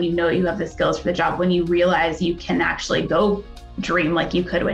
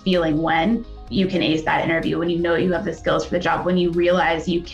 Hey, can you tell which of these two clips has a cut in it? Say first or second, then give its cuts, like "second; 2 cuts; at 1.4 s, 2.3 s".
second; 1 cut; at 1.1 s